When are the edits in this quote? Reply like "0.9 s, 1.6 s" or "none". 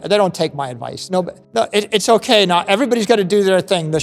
1.4 s